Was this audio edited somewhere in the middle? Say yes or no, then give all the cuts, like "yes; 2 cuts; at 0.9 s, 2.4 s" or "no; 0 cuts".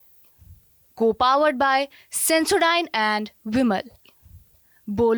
no; 0 cuts